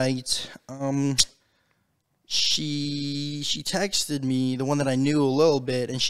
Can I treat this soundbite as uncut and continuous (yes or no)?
yes